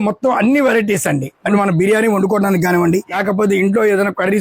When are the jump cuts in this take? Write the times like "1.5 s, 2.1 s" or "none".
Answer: 1.4 s, 3.1 s

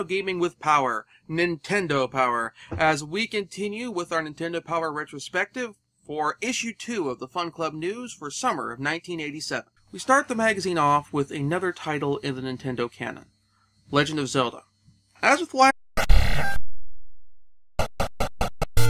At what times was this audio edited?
none

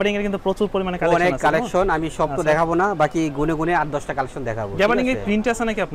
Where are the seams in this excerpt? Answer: none

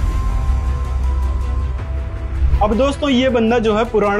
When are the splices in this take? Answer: none

